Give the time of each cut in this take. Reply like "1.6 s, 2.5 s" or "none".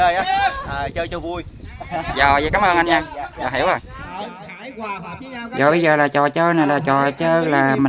4.1 s, 5.5 s